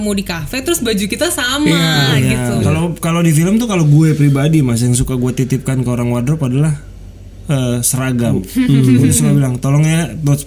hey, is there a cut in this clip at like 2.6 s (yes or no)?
yes